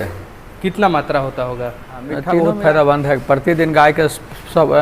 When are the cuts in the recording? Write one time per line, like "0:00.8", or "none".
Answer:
0:02.3